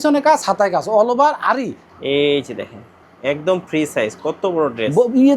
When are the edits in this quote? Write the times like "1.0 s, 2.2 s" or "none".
1.8 s